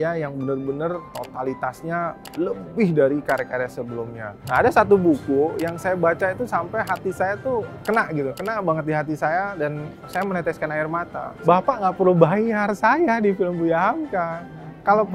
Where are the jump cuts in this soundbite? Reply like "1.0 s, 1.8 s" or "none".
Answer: 1.1 s, 2.2 s, 4.4 s, 11.3 s